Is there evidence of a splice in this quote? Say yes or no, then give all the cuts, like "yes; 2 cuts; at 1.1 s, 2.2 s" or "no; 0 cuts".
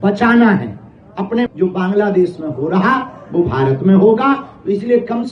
yes; 1 cut; at 1.5 s